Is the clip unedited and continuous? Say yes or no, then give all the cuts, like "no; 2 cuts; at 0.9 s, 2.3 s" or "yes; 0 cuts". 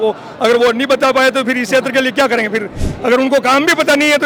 yes; 0 cuts